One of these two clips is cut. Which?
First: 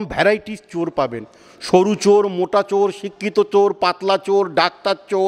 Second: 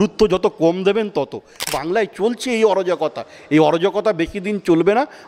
second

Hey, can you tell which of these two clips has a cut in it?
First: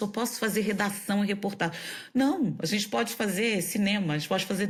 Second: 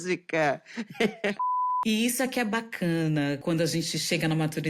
second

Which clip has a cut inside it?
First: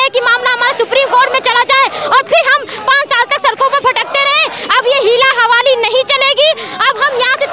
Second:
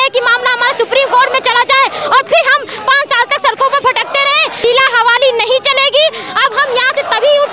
second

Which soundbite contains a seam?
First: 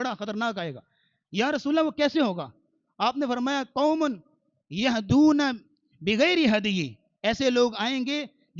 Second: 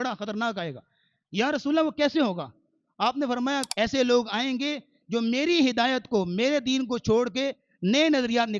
second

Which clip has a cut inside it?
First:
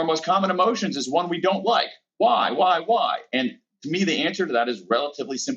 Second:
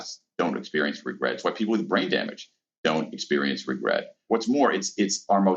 second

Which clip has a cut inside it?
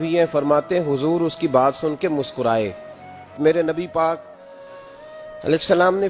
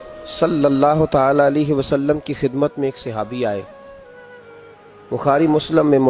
first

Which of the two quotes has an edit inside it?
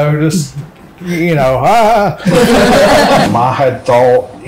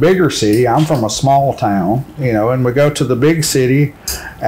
first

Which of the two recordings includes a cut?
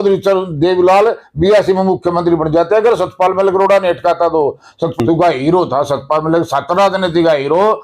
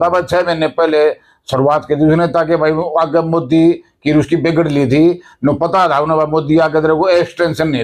first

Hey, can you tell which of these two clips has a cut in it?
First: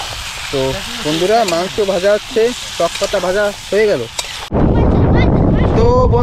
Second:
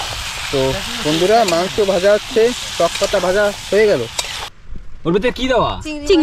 second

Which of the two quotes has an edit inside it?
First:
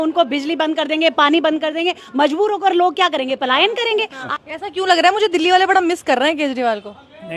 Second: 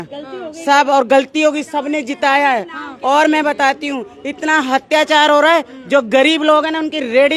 first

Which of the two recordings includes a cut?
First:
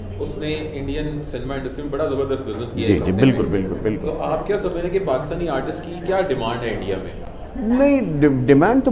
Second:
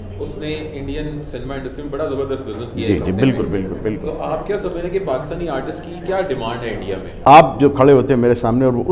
second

